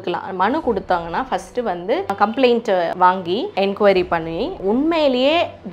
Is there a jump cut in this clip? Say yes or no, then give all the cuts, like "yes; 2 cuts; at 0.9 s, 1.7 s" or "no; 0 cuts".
yes; 3 cuts; at 2.1 s, 2.9 s, 4.5 s